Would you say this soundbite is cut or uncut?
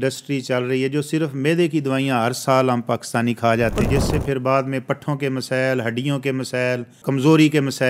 cut